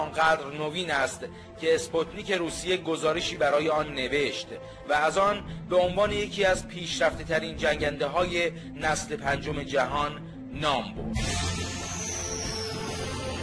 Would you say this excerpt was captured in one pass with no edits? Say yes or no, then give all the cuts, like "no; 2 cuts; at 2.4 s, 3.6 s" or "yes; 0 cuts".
no; 1 cut; at 12.5 s